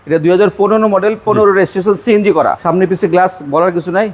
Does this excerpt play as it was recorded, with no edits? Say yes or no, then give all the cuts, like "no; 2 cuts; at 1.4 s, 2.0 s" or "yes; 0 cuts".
no; 1 cut; at 2.6 s